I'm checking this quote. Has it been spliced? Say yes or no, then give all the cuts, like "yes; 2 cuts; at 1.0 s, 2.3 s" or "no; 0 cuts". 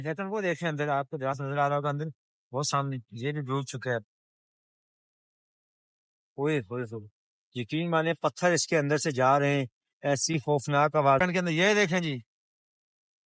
yes; 1 cut; at 11.2 s